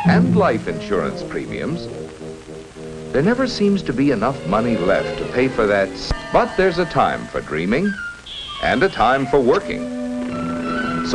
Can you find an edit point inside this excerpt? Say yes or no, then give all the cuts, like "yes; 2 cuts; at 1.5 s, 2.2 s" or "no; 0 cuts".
yes; 1 cut; at 2.1 s